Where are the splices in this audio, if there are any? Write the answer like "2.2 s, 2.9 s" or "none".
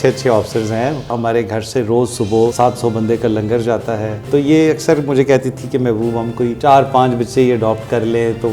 1.2 s, 2.5 s, 4.3 s, 6.6 s